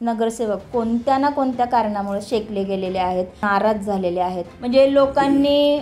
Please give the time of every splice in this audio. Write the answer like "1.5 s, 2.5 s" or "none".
3.4 s, 4.5 s

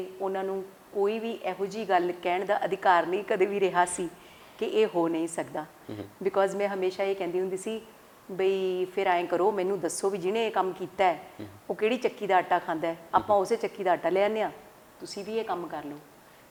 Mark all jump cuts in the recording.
none

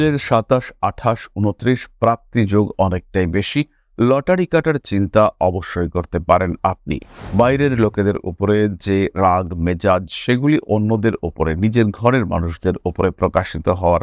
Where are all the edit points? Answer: 7.2 s

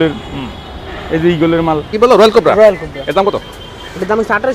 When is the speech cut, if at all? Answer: 1.9 s

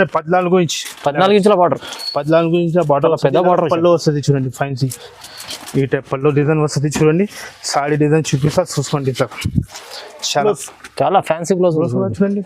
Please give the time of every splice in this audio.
10.4 s

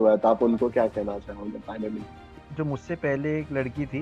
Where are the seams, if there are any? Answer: 2.4 s

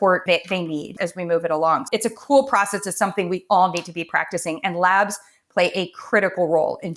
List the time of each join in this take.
0.9 s, 1.8 s

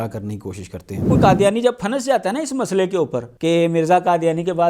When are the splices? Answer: 1.1 s, 3.3 s

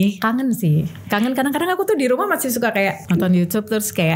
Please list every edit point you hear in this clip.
3.0 s

